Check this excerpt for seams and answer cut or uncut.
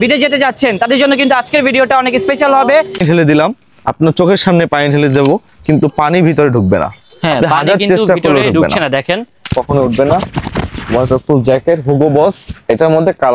cut